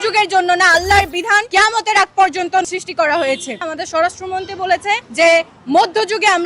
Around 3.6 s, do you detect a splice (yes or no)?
yes